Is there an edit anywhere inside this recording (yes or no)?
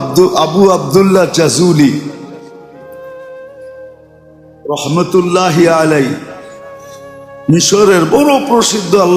yes